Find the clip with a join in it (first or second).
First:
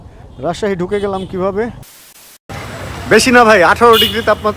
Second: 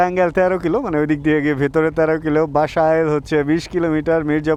first